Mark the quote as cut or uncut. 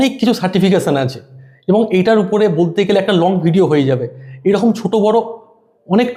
uncut